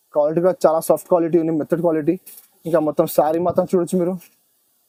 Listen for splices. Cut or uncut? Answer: uncut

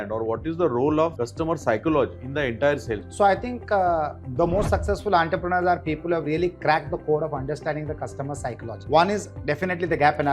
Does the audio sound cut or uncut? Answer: cut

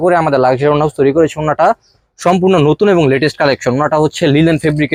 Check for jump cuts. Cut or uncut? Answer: uncut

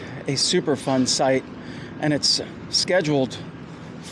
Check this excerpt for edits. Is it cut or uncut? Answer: uncut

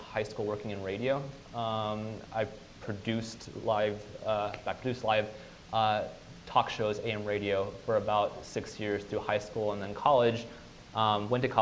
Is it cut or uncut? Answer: uncut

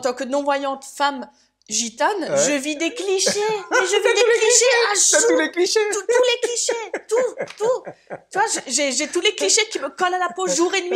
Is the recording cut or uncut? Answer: uncut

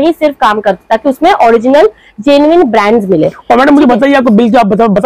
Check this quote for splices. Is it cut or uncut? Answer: uncut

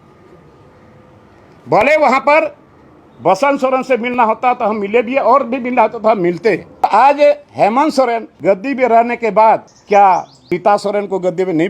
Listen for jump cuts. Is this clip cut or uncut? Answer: cut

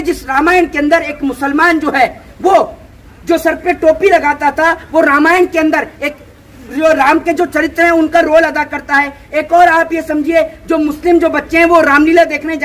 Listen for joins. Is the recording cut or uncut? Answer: uncut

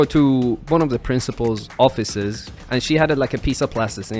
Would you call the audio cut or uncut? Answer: cut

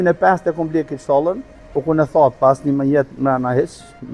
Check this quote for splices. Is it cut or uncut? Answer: uncut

